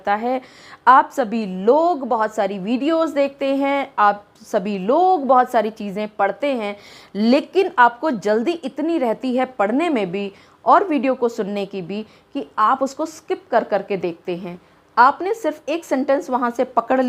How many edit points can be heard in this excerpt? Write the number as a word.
zero